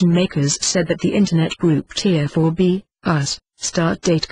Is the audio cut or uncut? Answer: cut